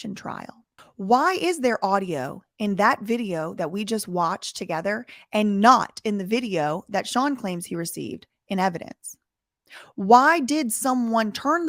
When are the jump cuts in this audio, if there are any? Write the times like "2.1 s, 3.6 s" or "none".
none